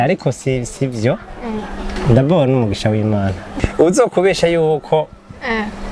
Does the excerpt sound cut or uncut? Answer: cut